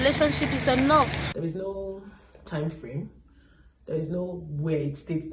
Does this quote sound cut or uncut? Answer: cut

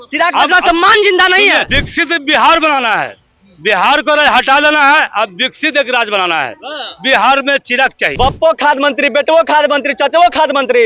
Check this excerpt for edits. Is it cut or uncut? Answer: cut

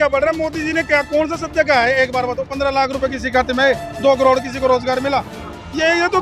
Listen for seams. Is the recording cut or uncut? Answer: uncut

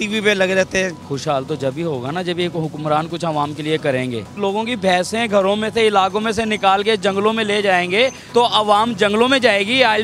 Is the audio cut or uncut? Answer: cut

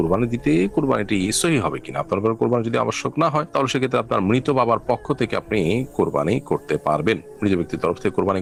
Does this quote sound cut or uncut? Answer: uncut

